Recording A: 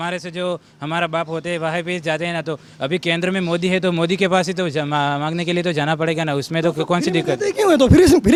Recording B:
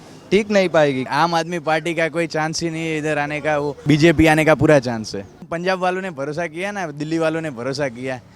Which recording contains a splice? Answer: B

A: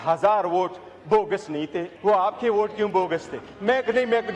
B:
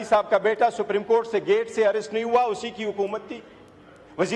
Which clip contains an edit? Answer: A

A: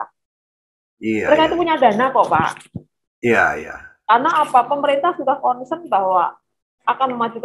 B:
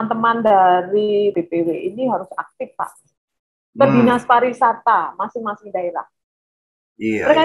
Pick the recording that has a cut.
B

